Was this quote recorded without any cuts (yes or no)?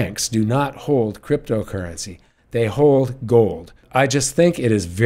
no